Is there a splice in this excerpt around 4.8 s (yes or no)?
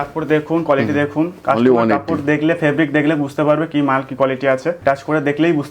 yes